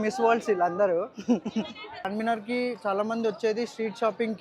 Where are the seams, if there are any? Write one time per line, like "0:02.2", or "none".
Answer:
0:02.1